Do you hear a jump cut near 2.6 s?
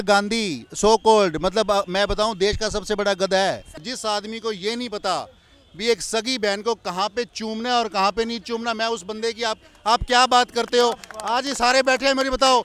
no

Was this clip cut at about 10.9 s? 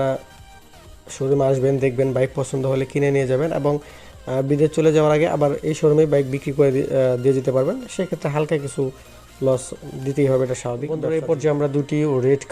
yes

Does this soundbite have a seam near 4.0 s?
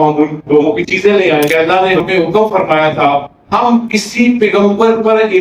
no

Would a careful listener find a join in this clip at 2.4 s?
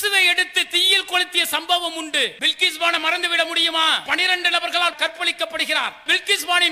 yes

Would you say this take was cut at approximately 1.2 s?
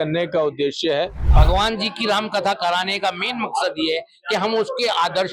yes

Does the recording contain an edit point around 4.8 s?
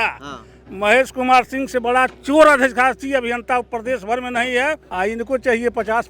yes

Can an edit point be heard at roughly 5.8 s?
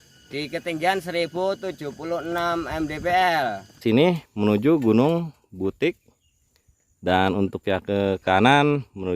no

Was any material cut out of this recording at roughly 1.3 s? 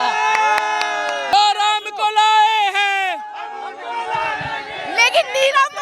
yes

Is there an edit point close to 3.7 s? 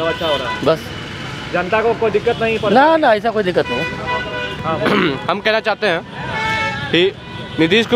no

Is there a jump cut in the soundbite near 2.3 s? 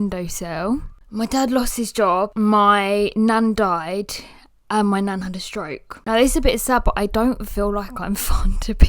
yes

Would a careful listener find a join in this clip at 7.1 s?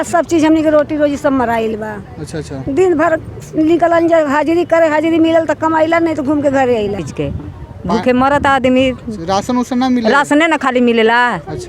yes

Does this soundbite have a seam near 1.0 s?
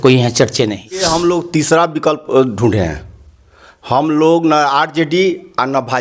yes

